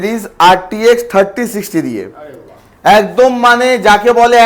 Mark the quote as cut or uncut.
uncut